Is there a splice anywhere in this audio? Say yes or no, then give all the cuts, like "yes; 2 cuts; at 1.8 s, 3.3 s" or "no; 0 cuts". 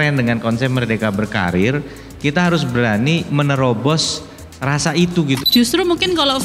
yes; 1 cut; at 5.4 s